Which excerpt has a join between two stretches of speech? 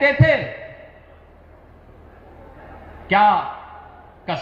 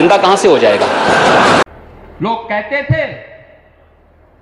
second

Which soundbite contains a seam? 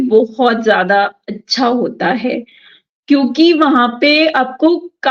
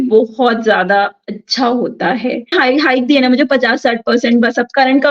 second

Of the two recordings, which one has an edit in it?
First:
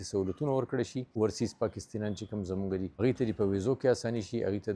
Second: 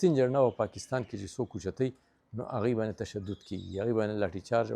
first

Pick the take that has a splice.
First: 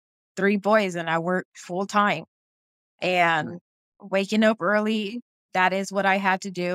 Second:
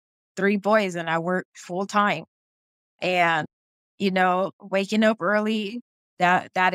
first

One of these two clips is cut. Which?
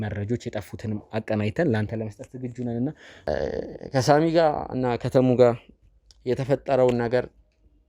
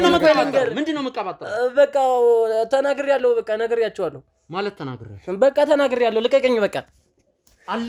first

